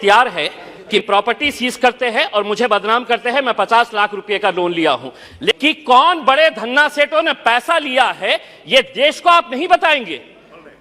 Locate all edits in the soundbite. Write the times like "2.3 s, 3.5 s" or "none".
1.0 s, 5.5 s